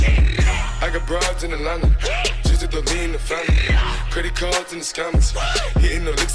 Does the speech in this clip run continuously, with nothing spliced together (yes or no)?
yes